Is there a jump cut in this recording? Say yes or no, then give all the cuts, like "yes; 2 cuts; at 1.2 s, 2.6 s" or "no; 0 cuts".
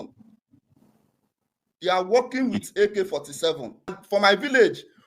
yes; 1 cut; at 4.0 s